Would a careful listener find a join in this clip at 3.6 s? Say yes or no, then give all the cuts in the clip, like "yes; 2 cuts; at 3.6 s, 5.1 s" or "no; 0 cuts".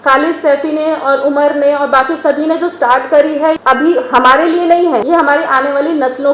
yes; 2 cuts; at 3.6 s, 5.0 s